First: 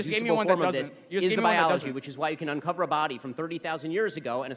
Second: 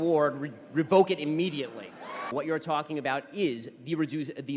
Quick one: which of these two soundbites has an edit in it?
second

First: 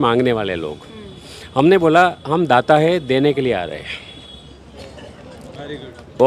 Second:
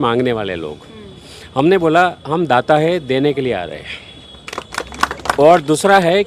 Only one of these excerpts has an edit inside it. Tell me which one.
second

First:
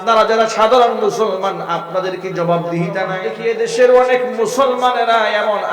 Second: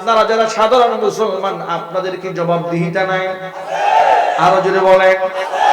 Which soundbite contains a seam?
first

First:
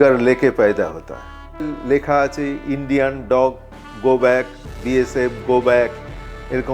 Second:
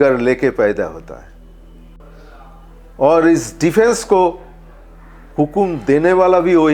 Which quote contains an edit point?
first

